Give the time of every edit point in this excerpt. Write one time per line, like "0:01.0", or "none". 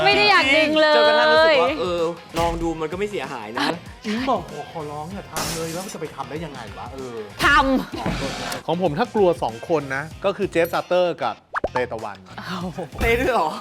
0:02.2
0:03.7
0:08.4
0:10.0